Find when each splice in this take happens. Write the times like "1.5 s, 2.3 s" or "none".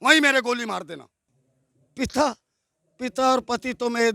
none